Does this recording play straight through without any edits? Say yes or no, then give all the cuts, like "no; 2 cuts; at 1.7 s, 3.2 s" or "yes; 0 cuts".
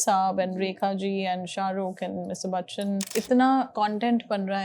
no; 2 cuts; at 3.1 s, 3.7 s